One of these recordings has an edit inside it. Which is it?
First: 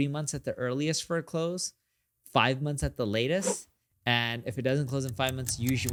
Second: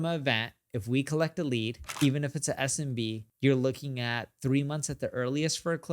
second; 2 cuts; at 1.8 s, 3.2 s

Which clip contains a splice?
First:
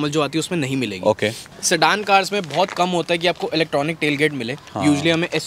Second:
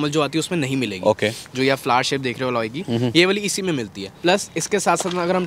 first; 1 cut; at 1.4 s

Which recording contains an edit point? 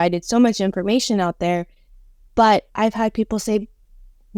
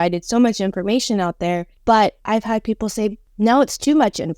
second; 2 cuts; at 1.7 s, 3.2 s

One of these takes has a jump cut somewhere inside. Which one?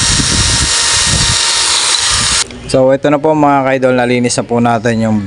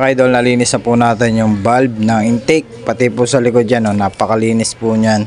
first; 1 cut; at 2.4 s

